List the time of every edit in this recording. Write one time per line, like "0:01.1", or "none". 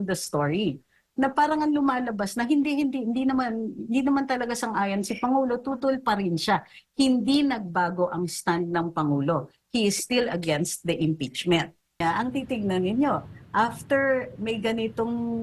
0:12.0